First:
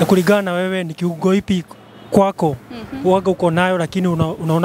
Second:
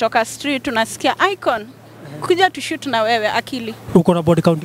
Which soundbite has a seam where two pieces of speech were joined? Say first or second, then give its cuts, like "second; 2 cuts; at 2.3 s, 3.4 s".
second; 1 cut; at 3.7 s